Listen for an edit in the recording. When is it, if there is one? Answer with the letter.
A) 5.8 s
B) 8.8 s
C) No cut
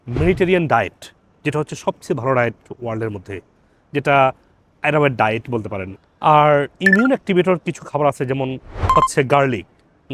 A